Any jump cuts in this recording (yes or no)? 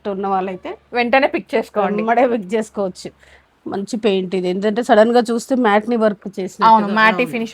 yes